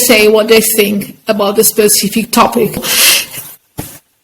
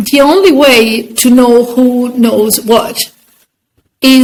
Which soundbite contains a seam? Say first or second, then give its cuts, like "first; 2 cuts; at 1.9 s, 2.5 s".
first; 1 cut; at 2.9 s